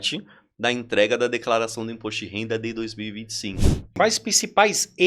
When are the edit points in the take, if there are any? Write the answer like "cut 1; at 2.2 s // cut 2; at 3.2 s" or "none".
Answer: cut 1; at 3.8 s